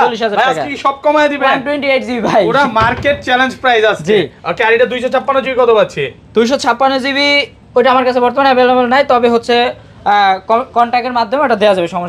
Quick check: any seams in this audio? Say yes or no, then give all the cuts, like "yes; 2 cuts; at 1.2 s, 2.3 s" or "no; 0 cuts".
no; 0 cuts